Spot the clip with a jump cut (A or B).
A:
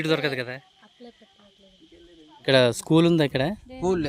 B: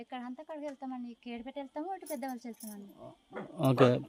A